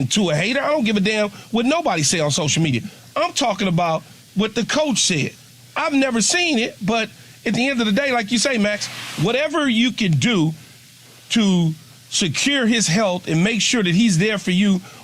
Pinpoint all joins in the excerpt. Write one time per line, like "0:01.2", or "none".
none